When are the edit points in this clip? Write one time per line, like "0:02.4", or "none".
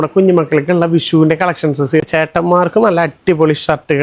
0:02.0

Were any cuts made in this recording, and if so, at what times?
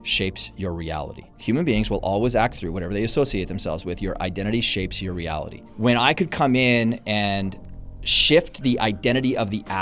0:01.3
0:05.6

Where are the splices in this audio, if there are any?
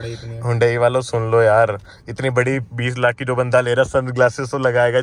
none

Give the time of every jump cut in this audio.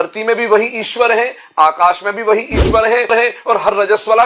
0:03.1

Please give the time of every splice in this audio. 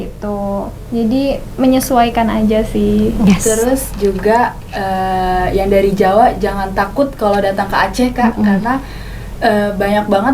0:03.3

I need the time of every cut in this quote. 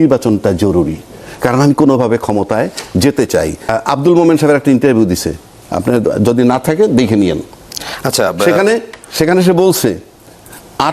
0:03.7

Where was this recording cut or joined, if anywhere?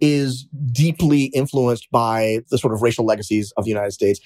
0:02.4
0:03.5

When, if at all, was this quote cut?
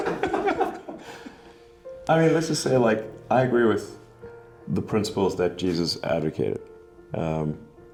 none

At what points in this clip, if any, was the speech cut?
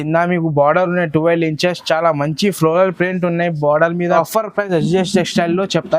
0:04.2

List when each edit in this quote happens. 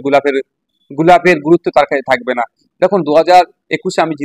none

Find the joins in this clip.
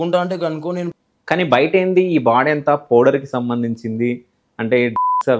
0:01.0

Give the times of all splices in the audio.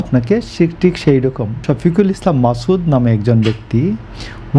0:01.7

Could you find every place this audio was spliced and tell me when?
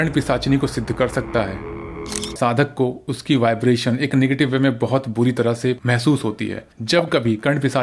0:02.3

